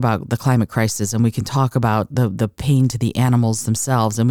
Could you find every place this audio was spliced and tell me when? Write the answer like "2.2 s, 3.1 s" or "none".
none